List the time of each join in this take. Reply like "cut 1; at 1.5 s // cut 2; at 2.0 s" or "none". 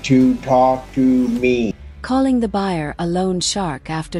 none